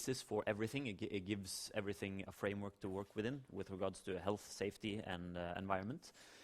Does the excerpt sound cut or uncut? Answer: cut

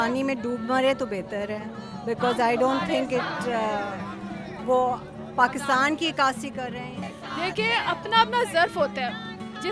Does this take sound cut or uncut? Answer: uncut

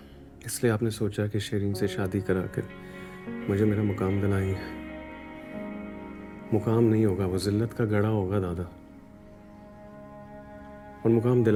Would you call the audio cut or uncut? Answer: uncut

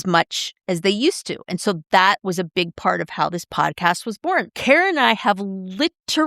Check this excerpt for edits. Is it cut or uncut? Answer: cut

